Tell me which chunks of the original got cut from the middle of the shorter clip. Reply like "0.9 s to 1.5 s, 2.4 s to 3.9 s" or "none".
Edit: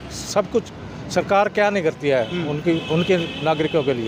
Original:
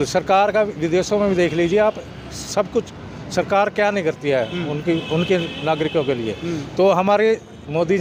none